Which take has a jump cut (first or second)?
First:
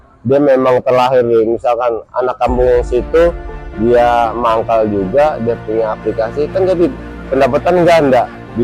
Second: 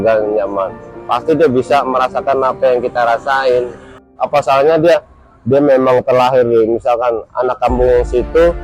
second